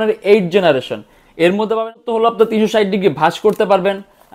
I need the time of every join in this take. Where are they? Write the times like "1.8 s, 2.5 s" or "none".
1.8 s